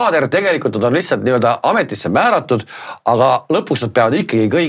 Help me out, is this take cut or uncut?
uncut